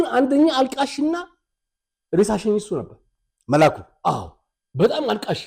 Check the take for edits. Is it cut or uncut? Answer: uncut